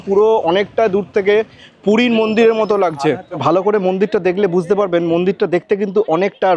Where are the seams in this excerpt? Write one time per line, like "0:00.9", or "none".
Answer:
0:03.4